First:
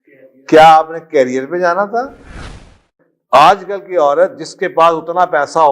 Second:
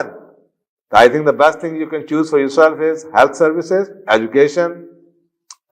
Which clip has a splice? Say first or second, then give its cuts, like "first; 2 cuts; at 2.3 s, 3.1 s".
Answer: first; 1 cut; at 2.8 s